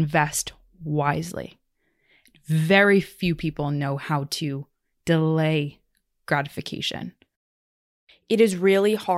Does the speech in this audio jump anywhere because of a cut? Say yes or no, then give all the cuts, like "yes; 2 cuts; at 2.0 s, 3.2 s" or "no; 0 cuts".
yes; 1 cut; at 7.7 s